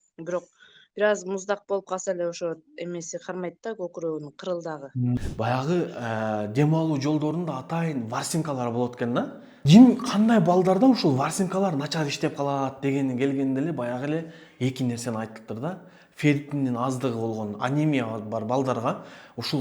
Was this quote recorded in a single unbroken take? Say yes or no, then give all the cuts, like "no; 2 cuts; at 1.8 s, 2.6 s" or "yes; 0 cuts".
no; 2 cuts; at 5.2 s, 9.5 s